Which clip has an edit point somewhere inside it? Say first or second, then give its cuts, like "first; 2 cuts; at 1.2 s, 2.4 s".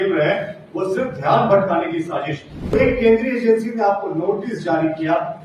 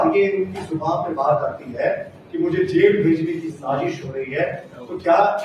first; 1 cut; at 2.7 s